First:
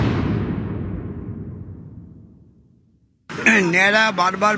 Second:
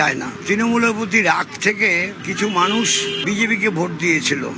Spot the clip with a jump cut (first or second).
first